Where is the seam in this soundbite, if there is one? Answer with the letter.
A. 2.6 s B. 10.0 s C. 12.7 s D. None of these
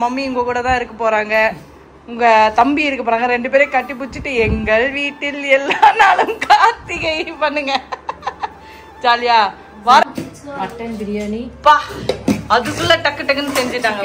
B